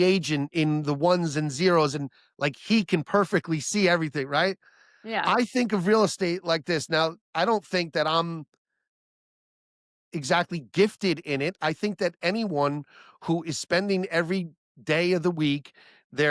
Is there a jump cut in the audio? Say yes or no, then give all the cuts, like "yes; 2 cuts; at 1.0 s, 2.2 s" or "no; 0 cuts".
no; 0 cuts